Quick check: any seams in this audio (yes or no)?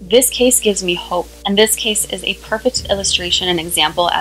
yes